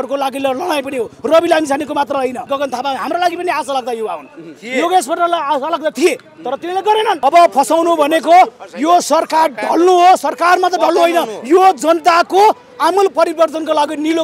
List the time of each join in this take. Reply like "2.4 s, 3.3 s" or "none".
2.4 s, 7.2 s